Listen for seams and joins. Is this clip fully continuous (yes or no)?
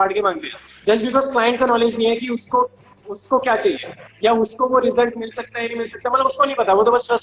yes